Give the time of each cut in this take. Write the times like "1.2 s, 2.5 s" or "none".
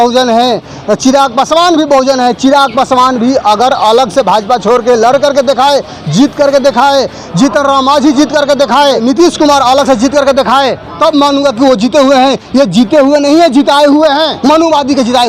9.0 s, 10.9 s, 14.3 s